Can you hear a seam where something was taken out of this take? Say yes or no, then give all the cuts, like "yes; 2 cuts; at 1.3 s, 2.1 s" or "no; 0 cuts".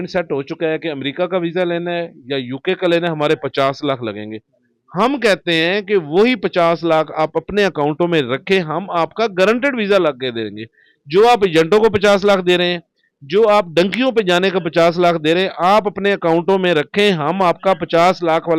no; 0 cuts